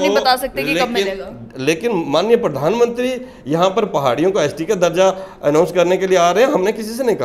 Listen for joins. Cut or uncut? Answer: uncut